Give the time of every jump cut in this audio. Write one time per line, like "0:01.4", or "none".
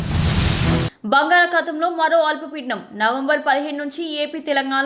0:00.9